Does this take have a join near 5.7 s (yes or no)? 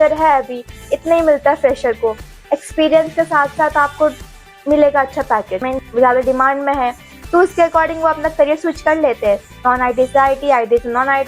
yes